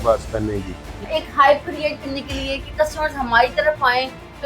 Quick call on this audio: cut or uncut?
cut